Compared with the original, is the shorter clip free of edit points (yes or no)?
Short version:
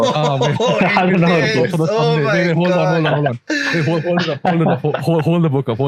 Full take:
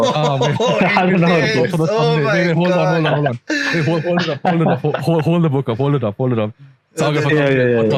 yes